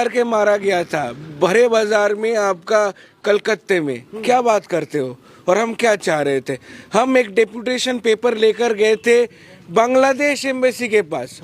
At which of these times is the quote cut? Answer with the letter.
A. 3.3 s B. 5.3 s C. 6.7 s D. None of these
D